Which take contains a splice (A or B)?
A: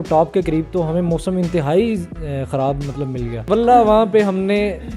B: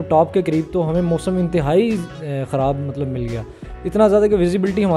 A